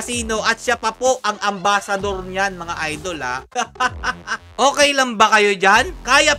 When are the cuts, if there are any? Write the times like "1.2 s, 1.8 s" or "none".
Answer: 3.4 s, 4.4 s